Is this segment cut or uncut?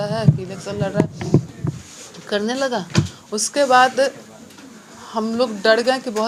uncut